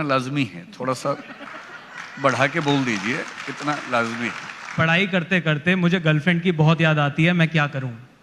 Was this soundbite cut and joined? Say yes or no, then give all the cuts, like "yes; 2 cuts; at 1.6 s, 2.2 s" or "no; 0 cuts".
yes; 1 cut; at 4.8 s